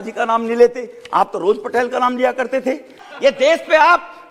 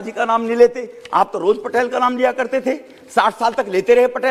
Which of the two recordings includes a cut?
first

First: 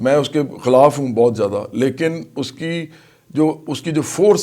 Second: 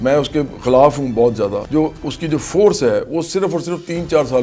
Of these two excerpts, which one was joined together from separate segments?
second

